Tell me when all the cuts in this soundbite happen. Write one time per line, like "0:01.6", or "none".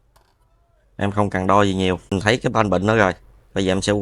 0:02.1

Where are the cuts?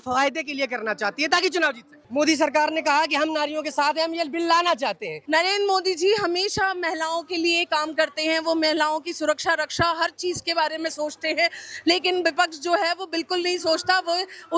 0:02.0
0:05.1

